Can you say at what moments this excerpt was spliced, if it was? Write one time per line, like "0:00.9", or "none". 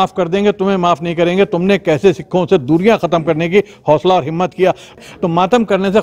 0:05.0